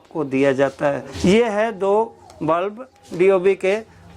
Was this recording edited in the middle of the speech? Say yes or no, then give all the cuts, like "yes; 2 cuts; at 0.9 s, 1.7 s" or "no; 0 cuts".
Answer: yes; 1 cut; at 1.1 s